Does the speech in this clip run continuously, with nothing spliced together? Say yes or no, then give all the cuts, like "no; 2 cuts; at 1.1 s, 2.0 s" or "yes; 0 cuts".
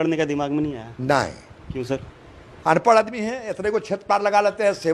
yes; 0 cuts